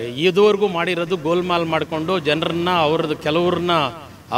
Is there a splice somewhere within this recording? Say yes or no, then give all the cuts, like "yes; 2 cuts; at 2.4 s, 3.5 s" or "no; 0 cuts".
no; 0 cuts